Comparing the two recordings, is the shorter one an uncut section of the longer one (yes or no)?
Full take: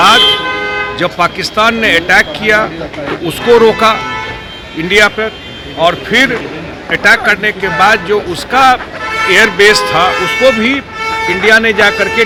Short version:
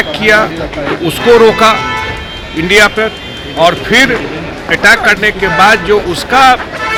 yes